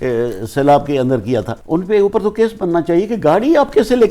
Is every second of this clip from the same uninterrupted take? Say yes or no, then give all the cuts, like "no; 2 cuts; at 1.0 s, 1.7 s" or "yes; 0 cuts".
no; 1 cut; at 1.5 s